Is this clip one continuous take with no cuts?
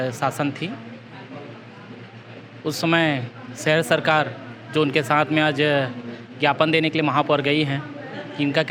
yes; 0 cuts

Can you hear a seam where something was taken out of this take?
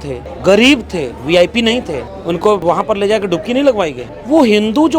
yes; 1 cut; at 2.6 s

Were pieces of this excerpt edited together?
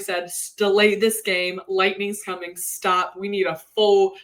no; 0 cuts

